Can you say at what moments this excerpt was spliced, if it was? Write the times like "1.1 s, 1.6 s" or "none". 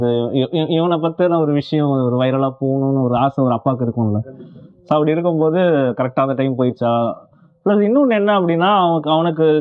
none

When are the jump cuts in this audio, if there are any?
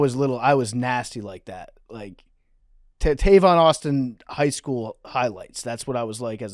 none

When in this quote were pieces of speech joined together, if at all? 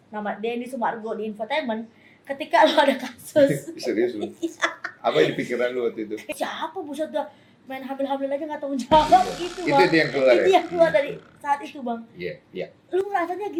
none

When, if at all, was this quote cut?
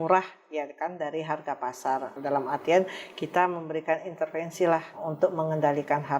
2.2 s, 5.1 s

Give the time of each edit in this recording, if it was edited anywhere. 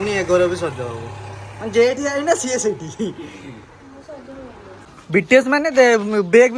4.9 s

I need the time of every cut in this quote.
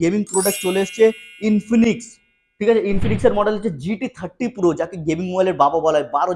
none

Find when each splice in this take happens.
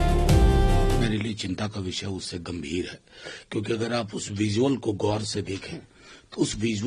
1.0 s

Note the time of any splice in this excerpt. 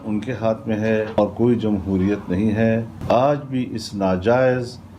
1.2 s, 2.9 s

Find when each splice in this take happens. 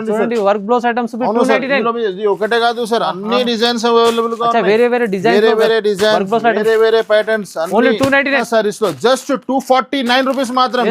8.4 s

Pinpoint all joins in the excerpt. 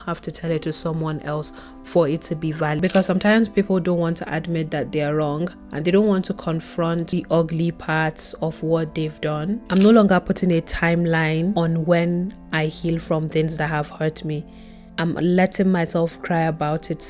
2.8 s, 9.6 s

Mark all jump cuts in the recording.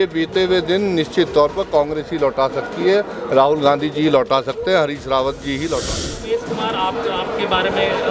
6.2 s

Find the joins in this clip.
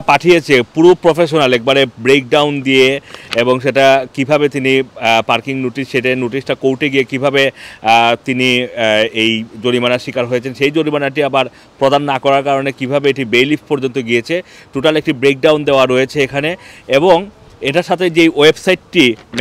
none

